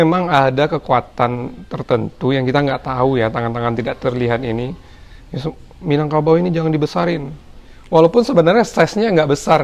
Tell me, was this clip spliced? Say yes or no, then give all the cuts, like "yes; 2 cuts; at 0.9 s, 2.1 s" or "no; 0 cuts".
no; 0 cuts